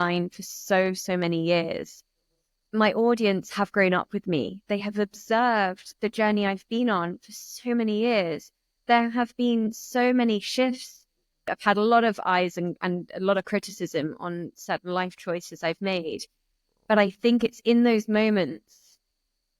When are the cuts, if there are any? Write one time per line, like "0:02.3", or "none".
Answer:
0:04.7
0:11.5